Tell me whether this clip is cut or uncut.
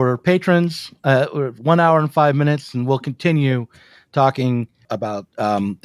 cut